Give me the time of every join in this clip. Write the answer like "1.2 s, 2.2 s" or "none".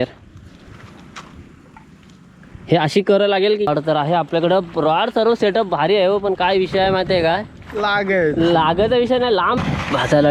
3.7 s, 9.6 s